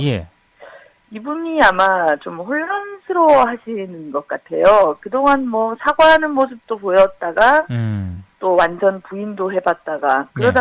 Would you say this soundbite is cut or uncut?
cut